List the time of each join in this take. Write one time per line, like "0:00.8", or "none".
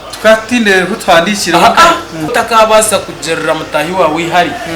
0:02.2